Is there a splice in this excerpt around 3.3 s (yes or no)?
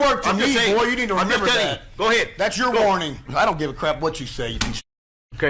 yes